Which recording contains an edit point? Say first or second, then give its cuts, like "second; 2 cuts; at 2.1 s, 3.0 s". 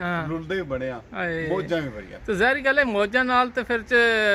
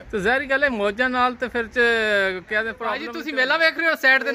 second; 1 cut; at 3.1 s